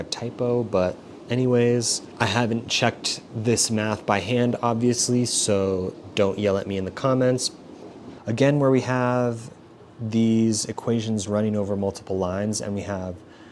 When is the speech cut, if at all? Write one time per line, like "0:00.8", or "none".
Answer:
0:08.2